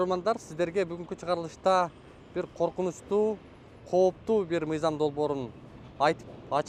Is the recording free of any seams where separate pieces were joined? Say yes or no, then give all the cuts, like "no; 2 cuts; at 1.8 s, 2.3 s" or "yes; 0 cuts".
yes; 0 cuts